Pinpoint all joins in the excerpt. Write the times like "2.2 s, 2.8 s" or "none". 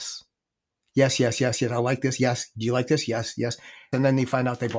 3.9 s